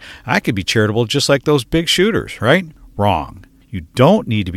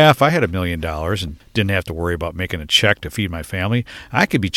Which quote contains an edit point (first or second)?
first